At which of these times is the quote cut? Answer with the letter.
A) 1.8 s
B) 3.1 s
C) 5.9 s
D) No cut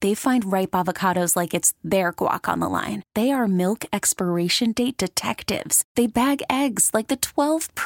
D